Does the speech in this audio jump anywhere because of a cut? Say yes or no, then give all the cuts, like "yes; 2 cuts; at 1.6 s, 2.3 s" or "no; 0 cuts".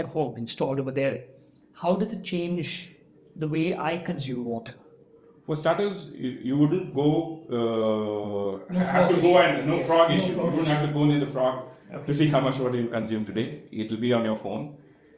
no; 0 cuts